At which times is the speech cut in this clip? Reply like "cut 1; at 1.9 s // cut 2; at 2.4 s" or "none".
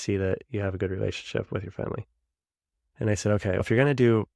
none